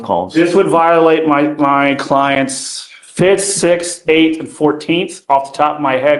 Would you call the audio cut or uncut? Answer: uncut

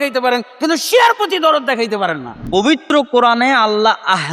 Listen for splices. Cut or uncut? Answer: cut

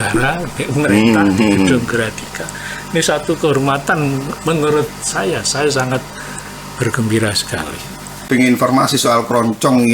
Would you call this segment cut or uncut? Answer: cut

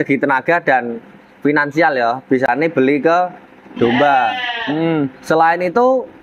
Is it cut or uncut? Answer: uncut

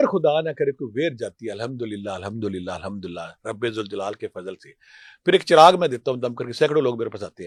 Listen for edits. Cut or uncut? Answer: uncut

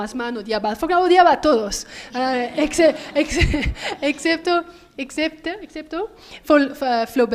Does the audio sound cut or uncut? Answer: cut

